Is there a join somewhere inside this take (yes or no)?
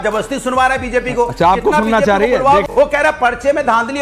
yes